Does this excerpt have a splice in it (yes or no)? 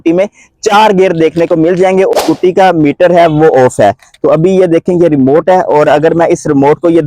yes